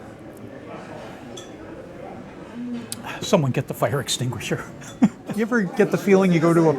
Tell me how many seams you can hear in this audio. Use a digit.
1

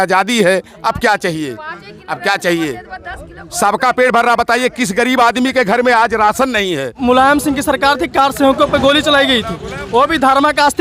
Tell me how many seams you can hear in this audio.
1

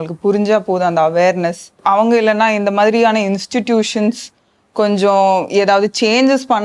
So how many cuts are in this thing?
1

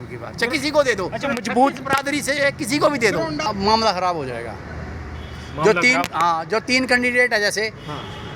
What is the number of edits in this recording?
1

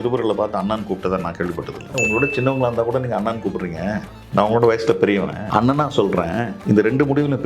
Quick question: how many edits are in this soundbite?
3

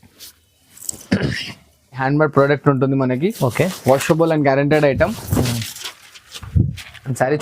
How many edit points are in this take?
1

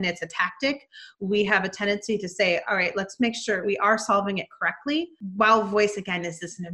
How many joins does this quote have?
2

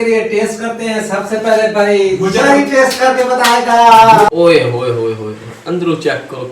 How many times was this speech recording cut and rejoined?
1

